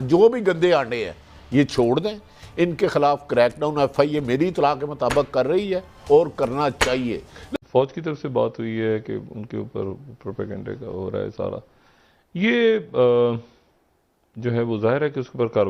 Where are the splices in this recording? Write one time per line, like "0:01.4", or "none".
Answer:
none